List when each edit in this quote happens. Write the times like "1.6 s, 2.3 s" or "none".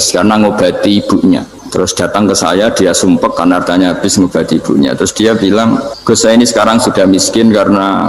1.6 s, 5.9 s